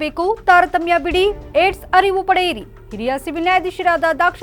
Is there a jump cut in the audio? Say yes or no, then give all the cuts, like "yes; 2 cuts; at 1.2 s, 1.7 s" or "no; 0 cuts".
no; 0 cuts